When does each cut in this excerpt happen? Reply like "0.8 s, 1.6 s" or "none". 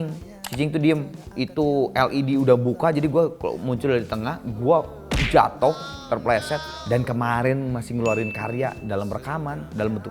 1.2 s, 6.7 s